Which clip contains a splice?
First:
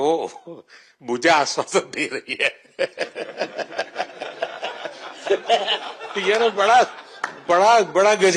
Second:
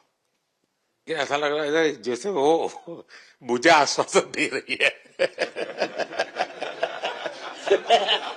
second; 1 cut; at 1.1 s

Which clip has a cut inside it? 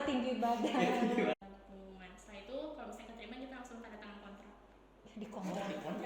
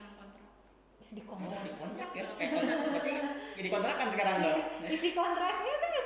first; 1 cut; at 1.3 s

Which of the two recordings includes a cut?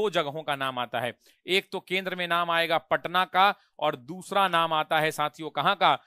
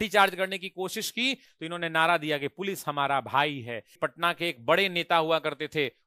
second; 2 cuts; at 1.5 s, 3.9 s

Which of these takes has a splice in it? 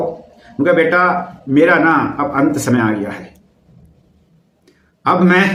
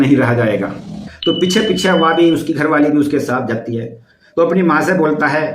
second; 1 cut; at 1.1 s

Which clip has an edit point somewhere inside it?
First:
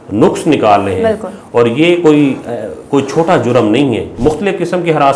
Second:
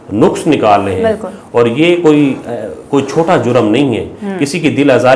first; 1 cut; at 4.1 s

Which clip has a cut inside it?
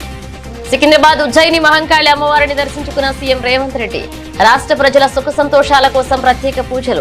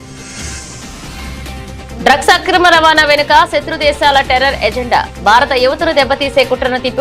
second; 1 cut; at 1.9 s

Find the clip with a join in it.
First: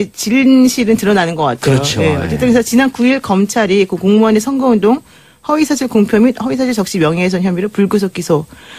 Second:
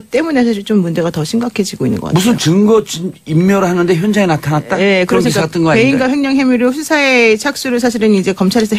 first; 1 cut; at 1.5 s

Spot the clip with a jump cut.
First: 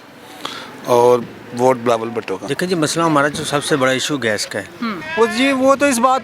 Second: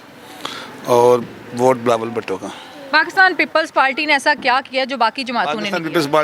first; 2 cuts; at 2.5 s, 5.0 s

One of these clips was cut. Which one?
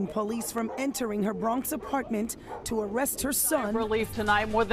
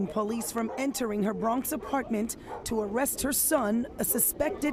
first; 1 cut; at 3.8 s

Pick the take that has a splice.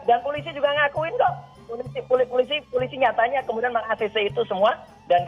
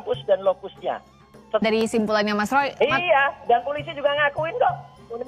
second; 1 cut; at 1.6 s

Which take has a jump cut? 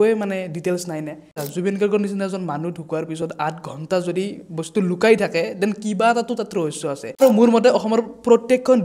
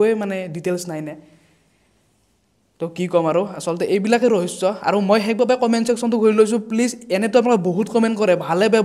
first; 2 cuts; at 1.4 s, 7.2 s

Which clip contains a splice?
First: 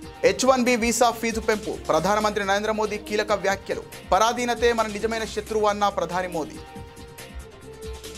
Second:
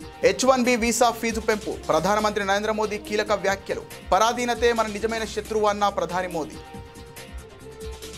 first; 1 cut; at 6.5 s

